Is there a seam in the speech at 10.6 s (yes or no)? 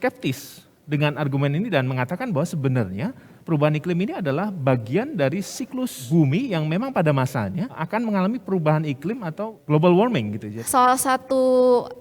yes